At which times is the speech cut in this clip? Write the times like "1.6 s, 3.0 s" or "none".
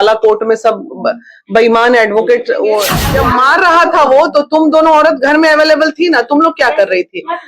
3.0 s

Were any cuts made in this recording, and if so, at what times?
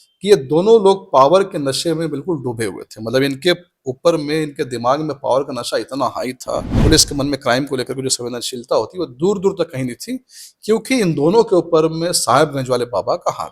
6.7 s

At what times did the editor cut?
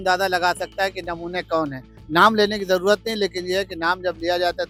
none

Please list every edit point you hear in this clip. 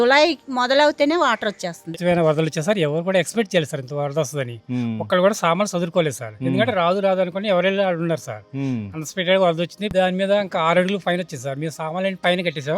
2.0 s, 9.9 s

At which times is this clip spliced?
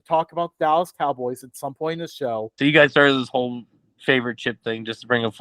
2.5 s

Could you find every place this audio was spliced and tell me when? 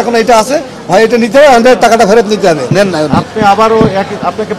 2.7 s

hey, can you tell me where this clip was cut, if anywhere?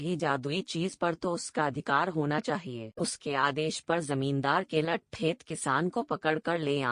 2.8 s

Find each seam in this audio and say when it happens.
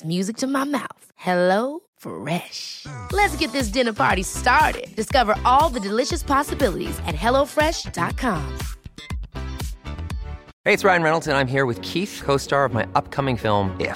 10.5 s

